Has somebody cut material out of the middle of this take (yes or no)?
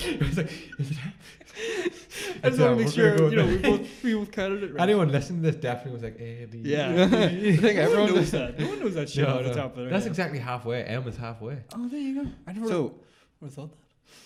no